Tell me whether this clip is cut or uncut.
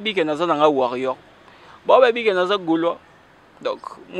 uncut